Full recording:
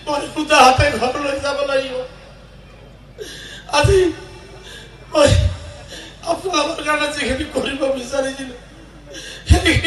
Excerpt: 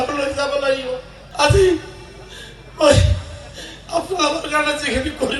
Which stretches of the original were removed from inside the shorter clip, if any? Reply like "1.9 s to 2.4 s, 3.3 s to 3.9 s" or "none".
2.2 s to 3.5 s